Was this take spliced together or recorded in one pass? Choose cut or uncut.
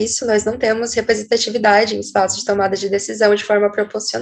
uncut